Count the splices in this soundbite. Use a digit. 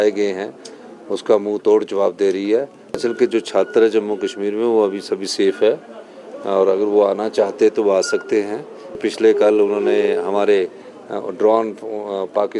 2